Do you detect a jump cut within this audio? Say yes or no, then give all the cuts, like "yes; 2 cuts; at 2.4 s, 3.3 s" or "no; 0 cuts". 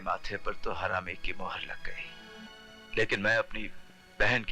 yes; 1 cut; at 2.5 s